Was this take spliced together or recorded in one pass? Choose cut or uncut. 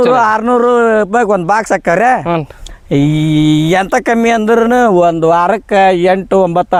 uncut